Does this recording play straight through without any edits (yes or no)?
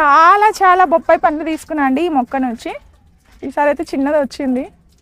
yes